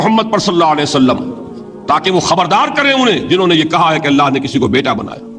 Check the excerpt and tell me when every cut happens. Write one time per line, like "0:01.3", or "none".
none